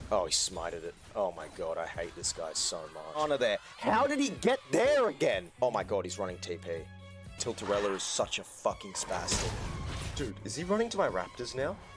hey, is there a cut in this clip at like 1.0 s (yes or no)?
no